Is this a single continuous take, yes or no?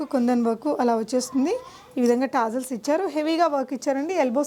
yes